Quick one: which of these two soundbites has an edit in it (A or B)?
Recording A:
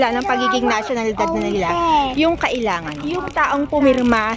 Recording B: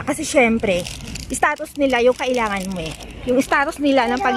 A